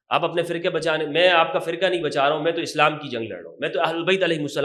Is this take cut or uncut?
uncut